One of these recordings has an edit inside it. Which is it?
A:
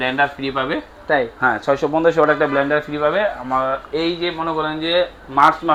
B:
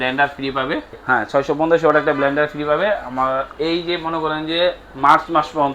B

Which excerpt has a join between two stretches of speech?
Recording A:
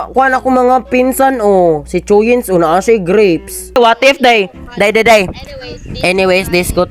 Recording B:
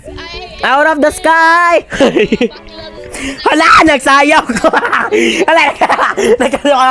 A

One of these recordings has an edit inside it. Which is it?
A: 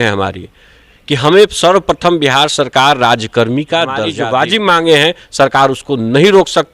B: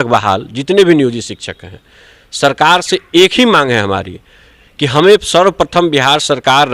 A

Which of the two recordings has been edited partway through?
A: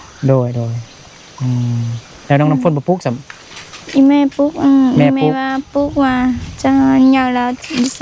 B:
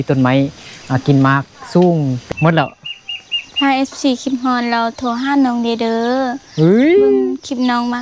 B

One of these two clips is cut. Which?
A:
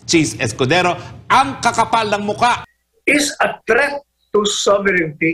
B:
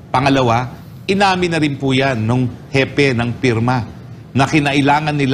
A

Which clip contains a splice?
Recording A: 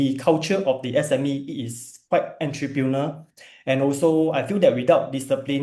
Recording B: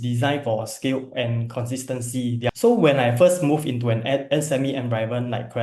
B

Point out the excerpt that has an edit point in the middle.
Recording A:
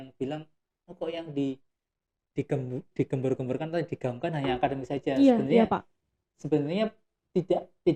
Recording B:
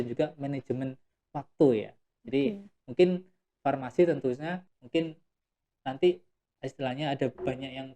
B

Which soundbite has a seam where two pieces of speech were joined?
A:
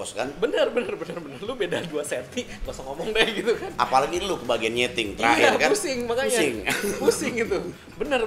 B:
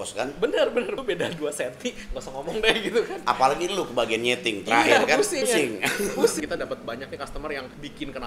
B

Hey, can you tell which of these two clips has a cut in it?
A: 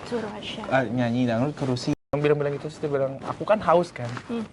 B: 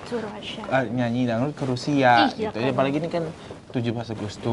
A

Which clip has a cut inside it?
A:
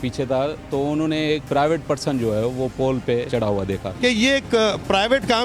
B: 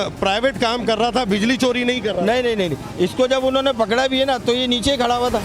A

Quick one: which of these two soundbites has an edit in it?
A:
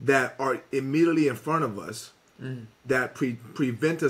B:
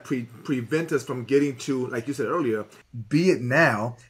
B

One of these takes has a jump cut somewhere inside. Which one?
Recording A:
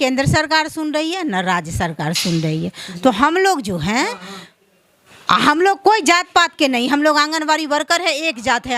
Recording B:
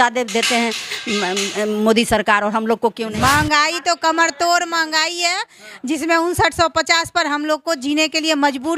B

